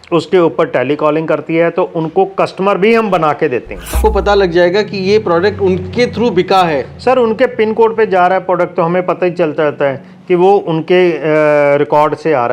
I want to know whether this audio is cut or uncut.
cut